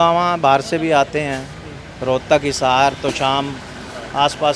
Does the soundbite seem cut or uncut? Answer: uncut